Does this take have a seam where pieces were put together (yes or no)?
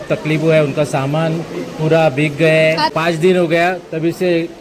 yes